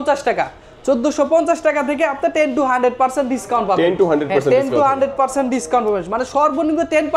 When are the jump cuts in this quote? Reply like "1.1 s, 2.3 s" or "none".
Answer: none